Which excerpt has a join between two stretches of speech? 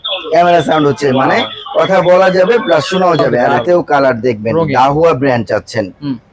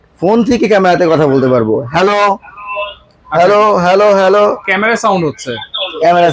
first; 1 cut; at 3.4 s

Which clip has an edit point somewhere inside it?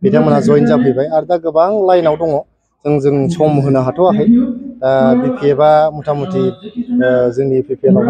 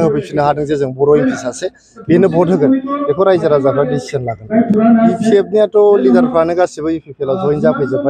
second; 1 cut; at 4.5 s

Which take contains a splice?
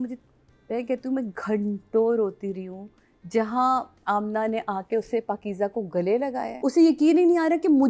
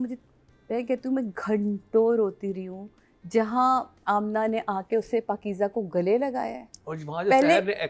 first; 1 cut; at 6.6 s

